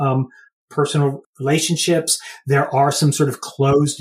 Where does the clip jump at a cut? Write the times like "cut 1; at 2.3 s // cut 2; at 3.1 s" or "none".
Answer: cut 1; at 1.2 s